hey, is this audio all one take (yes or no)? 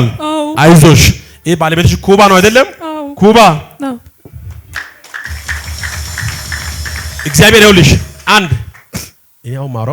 yes